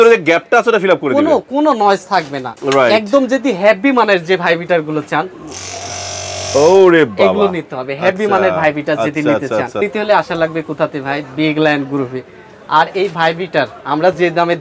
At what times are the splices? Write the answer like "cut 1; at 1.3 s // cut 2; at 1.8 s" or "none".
cut 1; at 2.1 s // cut 2; at 9.8 s